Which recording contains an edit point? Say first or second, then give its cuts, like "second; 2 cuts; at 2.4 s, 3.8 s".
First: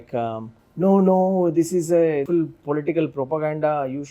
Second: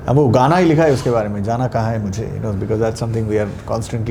first; 1 cut; at 2.2 s